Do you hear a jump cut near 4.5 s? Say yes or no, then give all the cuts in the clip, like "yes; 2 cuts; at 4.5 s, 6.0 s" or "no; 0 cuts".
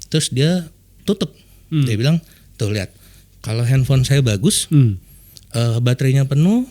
no; 1 cut; at 2.4 s